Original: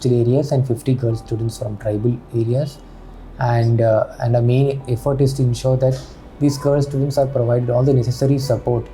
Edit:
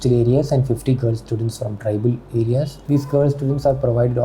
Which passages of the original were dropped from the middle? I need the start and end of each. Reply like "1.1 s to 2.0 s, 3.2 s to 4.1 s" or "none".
2.8 s to 6.3 s

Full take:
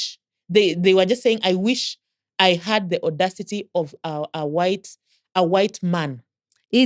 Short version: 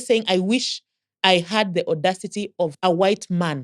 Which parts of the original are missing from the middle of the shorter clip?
3.9 s to 5.3 s

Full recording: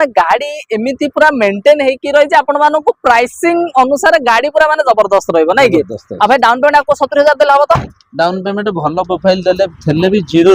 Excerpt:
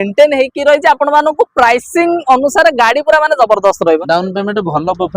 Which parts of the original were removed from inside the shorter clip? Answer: 5.5 s to 8.1 s

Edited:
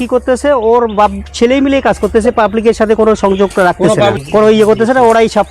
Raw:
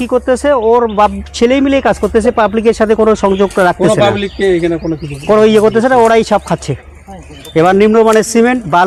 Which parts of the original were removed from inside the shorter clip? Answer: 4.2 s to 5.2 s

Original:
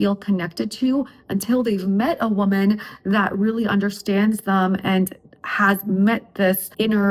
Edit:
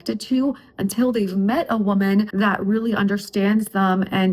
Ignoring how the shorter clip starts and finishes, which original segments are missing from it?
2.8 s to 3.0 s

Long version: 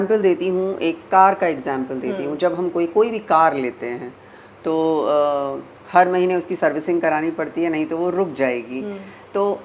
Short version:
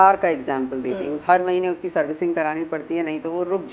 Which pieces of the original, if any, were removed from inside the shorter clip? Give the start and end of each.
2.3 s to 5.8 s

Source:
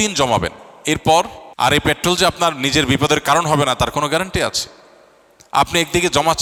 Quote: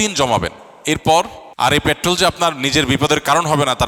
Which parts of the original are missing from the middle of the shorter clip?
none

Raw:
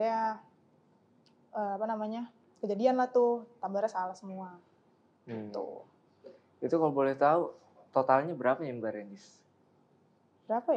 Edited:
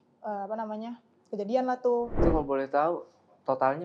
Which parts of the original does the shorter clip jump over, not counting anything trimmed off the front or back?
3.5 s to 6.6 s

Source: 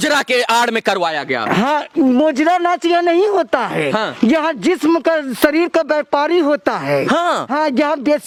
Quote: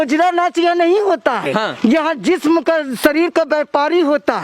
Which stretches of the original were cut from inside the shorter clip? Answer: 3.7 s to 3.8 s

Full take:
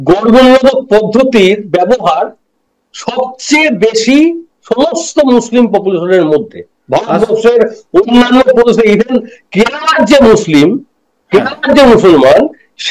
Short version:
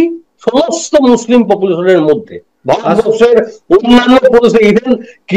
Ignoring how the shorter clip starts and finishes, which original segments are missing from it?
none

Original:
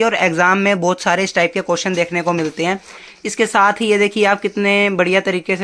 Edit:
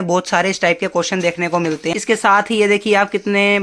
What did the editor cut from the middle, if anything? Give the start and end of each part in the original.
2.7 s to 3.2 s

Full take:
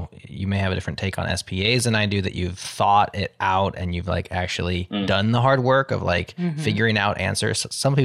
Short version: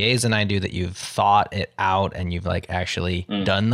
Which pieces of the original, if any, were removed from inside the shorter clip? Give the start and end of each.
none

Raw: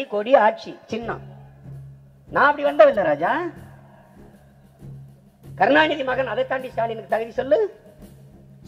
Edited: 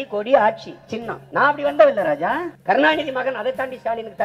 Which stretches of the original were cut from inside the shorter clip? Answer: 1.2 s to 2.2 s, 3.5 s to 5.5 s

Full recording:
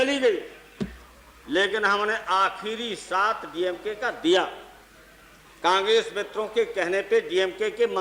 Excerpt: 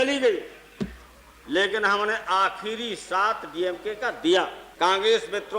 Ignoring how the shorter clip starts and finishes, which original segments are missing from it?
4.6 s to 5.5 s

